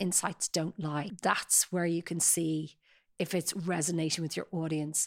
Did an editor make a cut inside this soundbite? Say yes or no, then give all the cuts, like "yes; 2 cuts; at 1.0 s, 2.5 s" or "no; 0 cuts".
yes; 1 cut; at 1.1 s